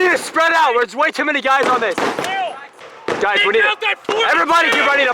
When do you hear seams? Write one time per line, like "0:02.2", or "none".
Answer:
0:02.6